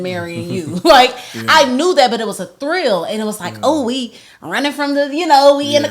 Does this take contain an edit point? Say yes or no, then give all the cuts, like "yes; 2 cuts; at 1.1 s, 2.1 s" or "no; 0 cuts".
no; 0 cuts